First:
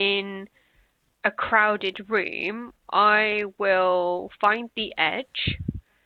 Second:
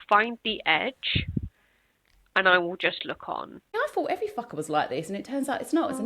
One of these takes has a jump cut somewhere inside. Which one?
second; 1 cut; at 3.7 s

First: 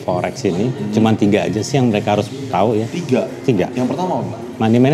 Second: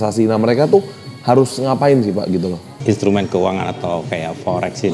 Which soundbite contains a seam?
second; 1 cut; at 2.6 s

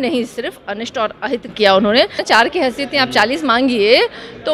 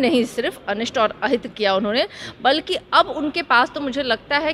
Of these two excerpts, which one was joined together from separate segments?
first; 1 cut; at 2.2 s

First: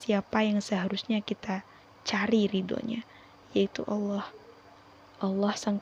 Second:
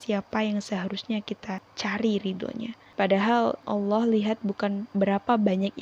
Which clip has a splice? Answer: second; 4 cuts; at 1.7 s, 2.8 s, 3.7 s, 4.8 s

